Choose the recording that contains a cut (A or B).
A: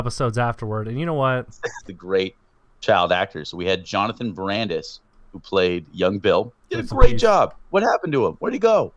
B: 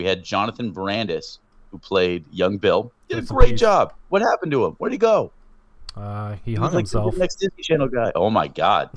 A